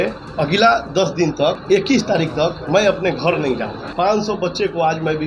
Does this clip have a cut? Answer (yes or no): yes